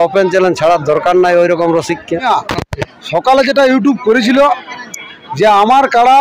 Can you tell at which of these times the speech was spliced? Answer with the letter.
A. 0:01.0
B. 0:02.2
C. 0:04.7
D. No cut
B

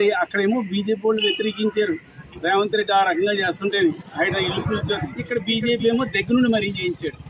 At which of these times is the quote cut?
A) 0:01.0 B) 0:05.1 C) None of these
B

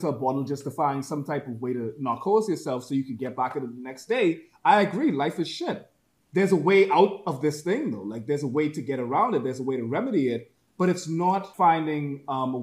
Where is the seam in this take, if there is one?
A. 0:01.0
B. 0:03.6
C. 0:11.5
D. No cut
C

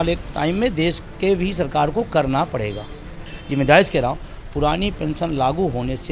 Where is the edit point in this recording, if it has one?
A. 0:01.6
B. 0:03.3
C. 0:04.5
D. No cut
B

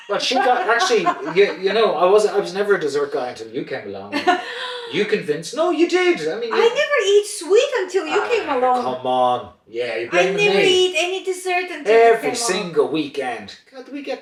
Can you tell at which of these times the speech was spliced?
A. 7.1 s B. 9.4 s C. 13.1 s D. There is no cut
D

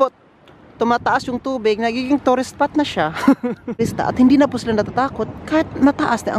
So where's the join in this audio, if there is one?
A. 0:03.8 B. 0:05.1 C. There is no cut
A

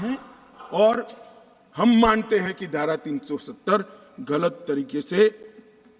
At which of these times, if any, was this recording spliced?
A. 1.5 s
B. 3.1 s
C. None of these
C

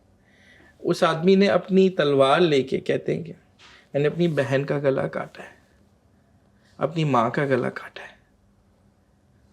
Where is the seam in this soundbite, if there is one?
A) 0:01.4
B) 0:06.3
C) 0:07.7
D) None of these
D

